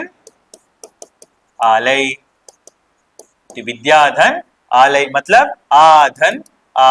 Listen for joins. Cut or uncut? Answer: uncut